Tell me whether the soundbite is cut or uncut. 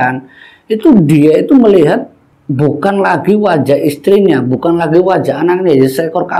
uncut